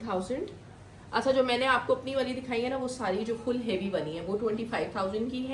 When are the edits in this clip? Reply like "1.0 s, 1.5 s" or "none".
none